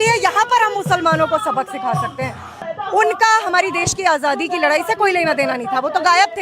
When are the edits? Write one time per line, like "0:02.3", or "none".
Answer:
0:02.7